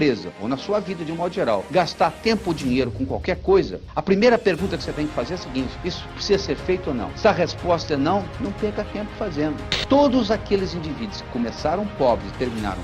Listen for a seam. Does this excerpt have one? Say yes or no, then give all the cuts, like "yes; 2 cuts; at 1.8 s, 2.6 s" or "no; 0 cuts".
yes; 1 cut; at 9.6 s